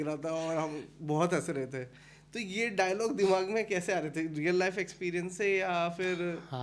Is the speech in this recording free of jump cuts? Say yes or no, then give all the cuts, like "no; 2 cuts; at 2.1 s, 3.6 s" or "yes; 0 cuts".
yes; 0 cuts